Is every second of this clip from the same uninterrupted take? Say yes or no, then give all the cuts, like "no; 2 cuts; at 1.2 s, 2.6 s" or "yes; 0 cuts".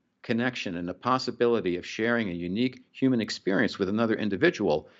yes; 0 cuts